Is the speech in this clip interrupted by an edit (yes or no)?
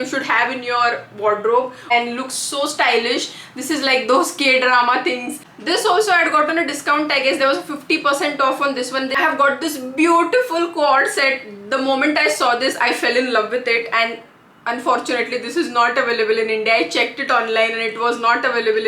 yes